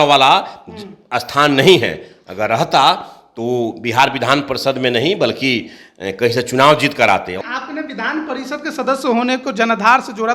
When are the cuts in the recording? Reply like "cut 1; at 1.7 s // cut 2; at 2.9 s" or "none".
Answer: cut 1; at 7.4 s